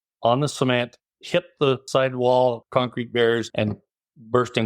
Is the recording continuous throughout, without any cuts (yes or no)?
no